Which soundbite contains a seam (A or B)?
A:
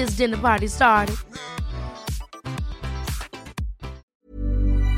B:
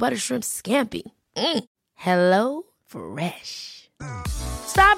A